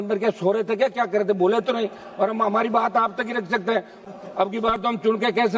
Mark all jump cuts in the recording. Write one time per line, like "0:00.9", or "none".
0:04.0